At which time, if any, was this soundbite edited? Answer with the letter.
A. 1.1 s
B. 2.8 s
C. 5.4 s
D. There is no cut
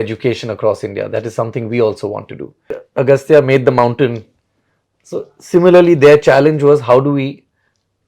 B